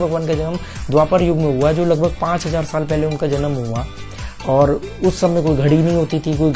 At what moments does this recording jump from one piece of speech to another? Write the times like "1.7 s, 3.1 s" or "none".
none